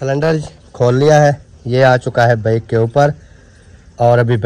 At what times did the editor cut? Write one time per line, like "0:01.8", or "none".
none